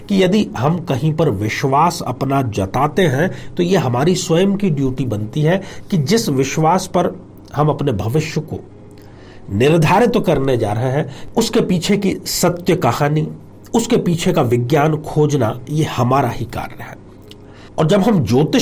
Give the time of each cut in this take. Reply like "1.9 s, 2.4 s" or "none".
none